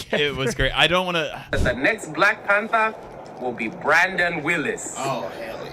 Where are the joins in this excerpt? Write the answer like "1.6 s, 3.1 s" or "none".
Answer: 1.5 s

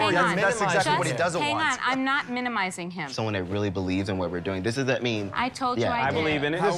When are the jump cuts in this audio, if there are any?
none

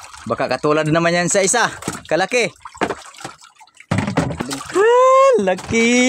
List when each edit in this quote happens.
4.4 s

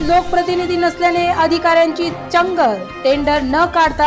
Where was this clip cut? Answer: none

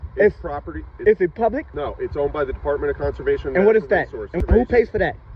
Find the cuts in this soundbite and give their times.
1.7 s, 4.4 s

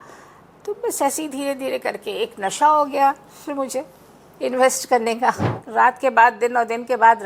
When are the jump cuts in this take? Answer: 5.5 s

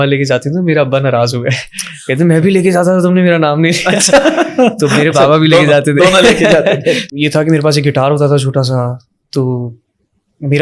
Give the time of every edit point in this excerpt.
7.0 s

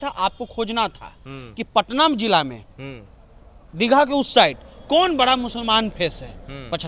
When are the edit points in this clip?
none

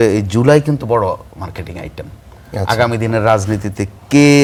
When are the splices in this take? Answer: none

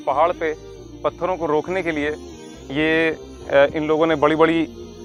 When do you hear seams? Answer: none

